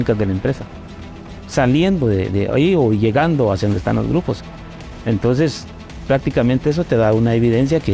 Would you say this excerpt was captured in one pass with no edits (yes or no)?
yes